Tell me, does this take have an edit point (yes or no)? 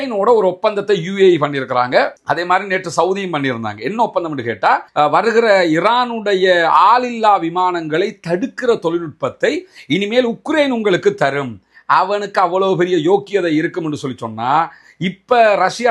no